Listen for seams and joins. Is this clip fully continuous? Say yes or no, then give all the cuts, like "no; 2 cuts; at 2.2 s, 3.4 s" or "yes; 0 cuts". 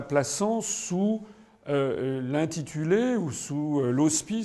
yes; 0 cuts